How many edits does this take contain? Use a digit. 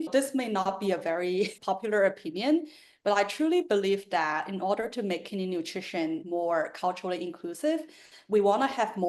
2